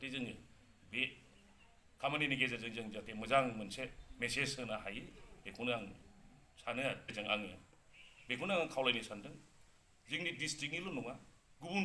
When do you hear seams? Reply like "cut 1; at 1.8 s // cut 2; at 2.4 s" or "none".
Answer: cut 1; at 7.1 s